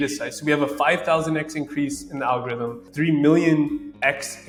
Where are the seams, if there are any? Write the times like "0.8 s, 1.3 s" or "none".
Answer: none